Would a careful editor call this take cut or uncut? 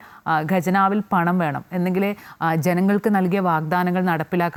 uncut